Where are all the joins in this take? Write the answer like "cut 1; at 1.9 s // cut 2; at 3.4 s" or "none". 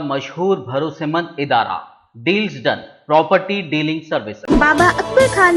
cut 1; at 4.3 s